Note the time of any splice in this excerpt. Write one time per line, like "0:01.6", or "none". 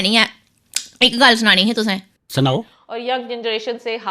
0:02.8